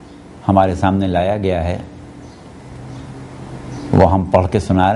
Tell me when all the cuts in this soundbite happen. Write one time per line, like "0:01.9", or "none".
0:02.9